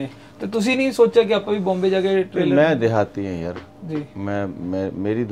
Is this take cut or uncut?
uncut